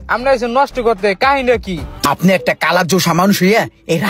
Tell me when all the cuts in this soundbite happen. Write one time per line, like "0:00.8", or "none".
0:02.0